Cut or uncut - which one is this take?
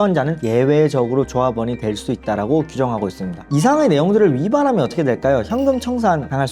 cut